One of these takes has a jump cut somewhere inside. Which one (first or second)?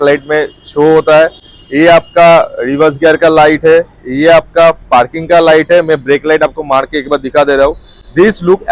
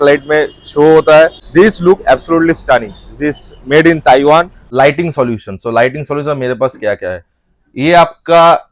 second